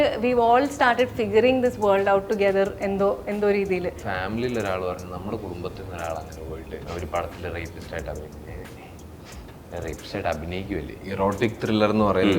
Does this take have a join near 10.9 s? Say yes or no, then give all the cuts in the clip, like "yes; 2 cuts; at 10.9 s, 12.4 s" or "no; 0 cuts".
yes; 3 cuts; at 4.1 s, 6.8 s, 10.9 s